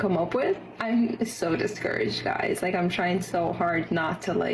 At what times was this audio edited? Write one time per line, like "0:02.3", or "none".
0:02.9